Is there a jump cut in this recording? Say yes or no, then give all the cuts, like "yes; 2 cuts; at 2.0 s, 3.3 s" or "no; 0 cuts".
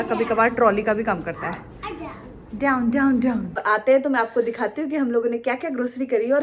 yes; 1 cut; at 3.5 s